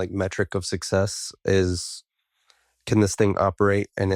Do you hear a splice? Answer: no; 0 cuts

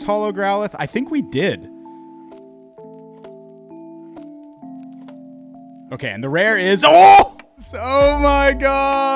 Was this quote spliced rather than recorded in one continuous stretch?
yes; 1 cut; at 7.8 s

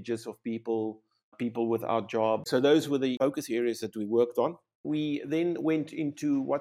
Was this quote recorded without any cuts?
no; 4 cuts; at 1.3 s, 2.5 s, 3.2 s, 4.8 s

